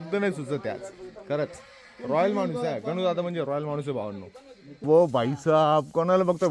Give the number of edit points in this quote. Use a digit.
1